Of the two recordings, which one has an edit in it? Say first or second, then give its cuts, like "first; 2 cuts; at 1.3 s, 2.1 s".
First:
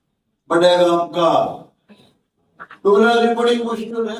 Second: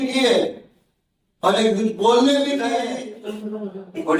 second; 1 cut; at 2.6 s